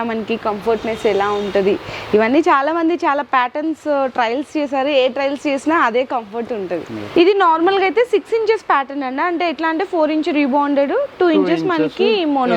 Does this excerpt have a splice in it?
yes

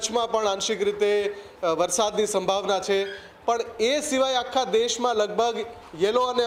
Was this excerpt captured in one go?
yes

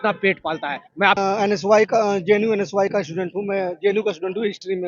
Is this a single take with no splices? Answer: yes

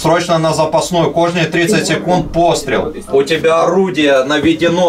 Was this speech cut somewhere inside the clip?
yes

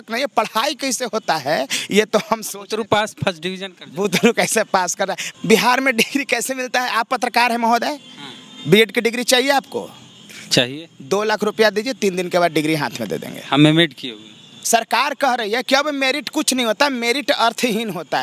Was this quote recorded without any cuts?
no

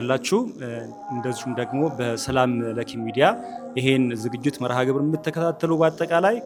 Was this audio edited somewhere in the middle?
no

